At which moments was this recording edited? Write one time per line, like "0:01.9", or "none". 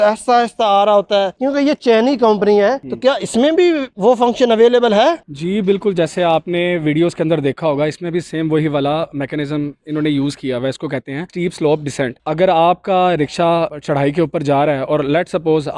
none